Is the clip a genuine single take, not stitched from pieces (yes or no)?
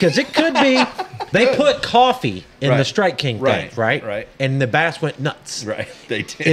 no